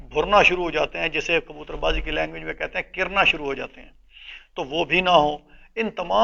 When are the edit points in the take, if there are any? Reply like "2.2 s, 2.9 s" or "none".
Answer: none